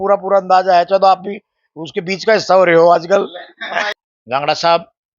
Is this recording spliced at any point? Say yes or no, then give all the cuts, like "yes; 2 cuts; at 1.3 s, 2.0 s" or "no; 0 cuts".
yes; 1 cut; at 3.9 s